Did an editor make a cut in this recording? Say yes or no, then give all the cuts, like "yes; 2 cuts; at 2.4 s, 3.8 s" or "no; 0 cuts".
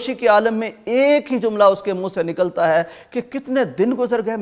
no; 0 cuts